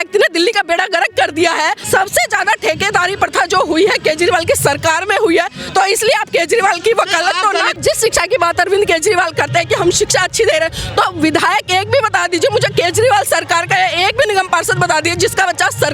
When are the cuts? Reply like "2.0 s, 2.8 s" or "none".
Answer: 1.8 s, 7.8 s